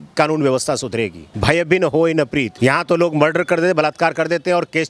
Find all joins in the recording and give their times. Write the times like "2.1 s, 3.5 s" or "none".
1.3 s, 2.5 s